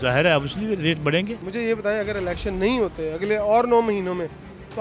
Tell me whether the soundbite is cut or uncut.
cut